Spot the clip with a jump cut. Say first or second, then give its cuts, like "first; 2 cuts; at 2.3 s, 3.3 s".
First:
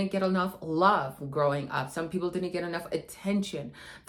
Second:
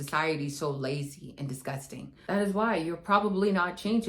second; 1 cut; at 2.1 s